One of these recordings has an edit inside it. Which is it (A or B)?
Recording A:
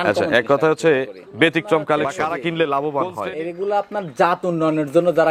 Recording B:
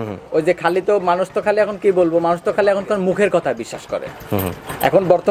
A